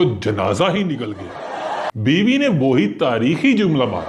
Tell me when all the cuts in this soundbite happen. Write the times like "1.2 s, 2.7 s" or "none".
1.9 s